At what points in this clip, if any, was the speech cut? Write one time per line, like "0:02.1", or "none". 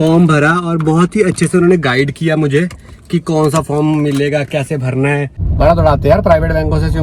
0:05.4